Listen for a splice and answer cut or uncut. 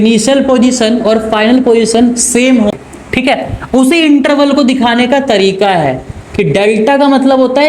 cut